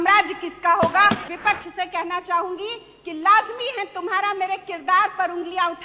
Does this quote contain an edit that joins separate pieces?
yes; 1 cut; at 1.2 s

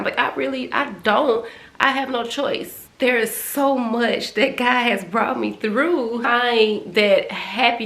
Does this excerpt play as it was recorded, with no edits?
no; 2 cuts; at 2.8 s, 6.3 s

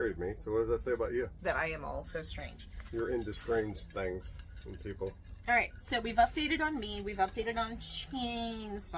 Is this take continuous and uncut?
yes; 0 cuts

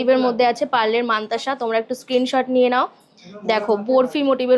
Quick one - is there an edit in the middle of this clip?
no; 0 cuts

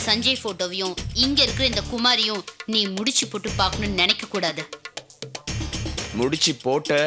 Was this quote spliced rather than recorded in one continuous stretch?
no; 0 cuts

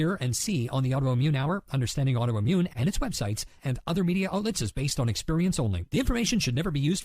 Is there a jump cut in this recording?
yes; 1 cut; at 2.7 s

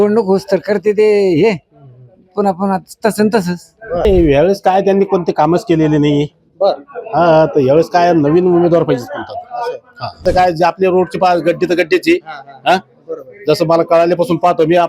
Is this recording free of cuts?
no; 2 cuts; at 4.0 s, 10.2 s

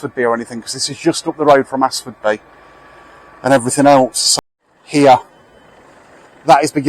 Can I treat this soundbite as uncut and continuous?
no; 1 cut; at 4.2 s

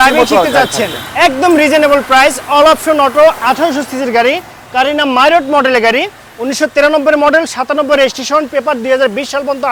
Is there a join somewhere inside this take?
no; 0 cuts

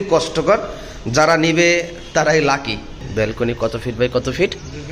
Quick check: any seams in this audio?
yes; 1 cut; at 3.0 s

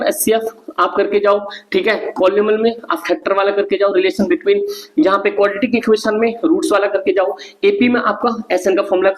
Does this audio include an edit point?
no; 0 cuts

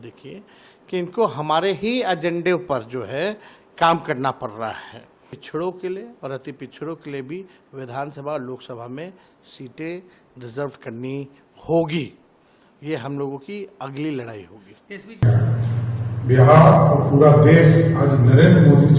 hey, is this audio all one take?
no; 2 cuts; at 5.3 s, 15.2 s

